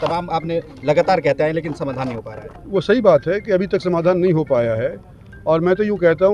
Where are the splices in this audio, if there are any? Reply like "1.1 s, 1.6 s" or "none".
none